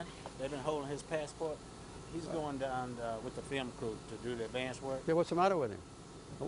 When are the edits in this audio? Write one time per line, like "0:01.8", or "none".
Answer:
0:05.4